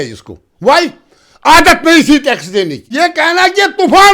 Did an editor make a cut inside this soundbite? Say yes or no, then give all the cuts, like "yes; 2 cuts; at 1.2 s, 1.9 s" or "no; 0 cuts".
yes; 1 cut; at 2.9 s